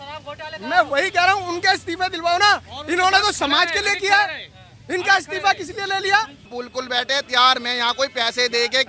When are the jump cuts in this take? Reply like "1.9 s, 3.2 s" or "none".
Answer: 6.5 s